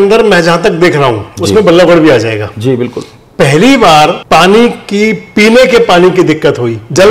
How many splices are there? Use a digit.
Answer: 1